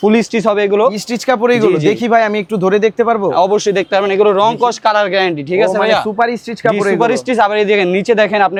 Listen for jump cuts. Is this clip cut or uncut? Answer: uncut